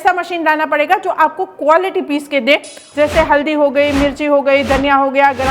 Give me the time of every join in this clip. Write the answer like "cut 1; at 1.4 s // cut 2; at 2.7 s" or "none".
cut 1; at 2.8 s